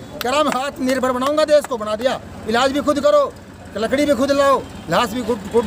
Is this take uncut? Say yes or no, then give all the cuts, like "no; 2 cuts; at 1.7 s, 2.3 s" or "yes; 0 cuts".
yes; 0 cuts